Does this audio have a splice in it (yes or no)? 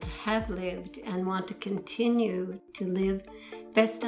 no